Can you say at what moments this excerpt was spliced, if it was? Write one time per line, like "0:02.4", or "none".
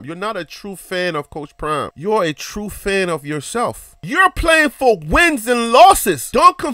0:04.0